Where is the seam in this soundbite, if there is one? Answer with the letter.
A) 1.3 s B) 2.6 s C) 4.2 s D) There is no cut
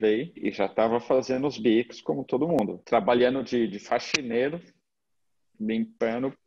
B